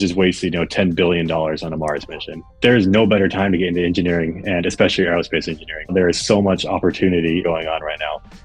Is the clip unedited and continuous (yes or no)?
no